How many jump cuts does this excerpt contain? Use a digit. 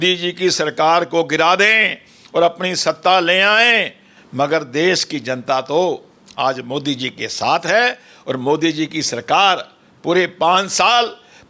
0